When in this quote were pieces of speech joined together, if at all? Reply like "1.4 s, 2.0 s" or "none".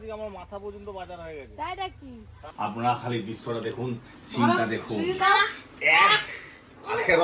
2.4 s

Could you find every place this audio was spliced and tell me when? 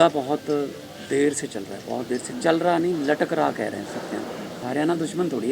4.6 s

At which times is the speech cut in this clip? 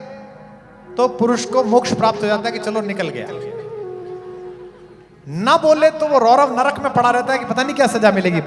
none

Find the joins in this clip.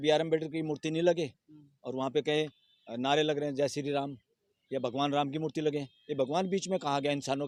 none

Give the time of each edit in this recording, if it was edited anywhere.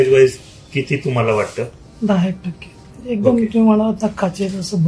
none

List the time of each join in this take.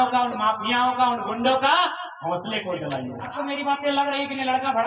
3.3 s

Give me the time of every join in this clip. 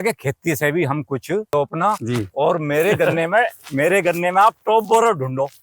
1.5 s

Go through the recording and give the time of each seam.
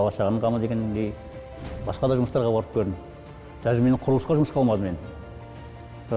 1.4 s

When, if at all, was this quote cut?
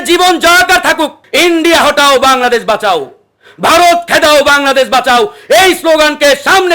1.2 s

